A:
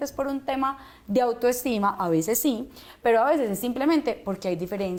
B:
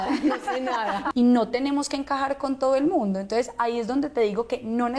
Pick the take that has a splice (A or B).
B